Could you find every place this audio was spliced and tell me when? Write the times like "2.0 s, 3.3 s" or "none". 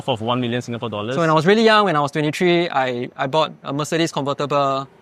1.1 s